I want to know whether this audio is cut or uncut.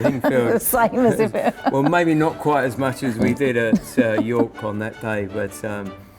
uncut